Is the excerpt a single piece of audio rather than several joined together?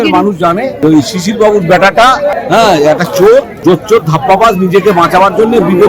no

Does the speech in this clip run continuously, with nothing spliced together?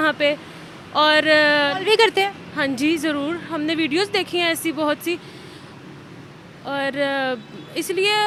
yes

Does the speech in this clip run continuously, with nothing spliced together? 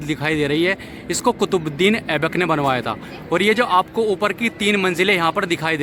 yes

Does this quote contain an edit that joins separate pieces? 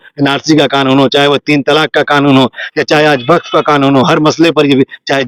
no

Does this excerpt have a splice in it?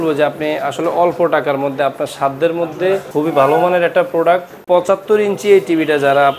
yes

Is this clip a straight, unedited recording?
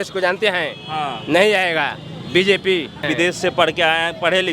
no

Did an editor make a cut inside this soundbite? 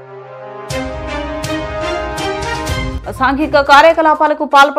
yes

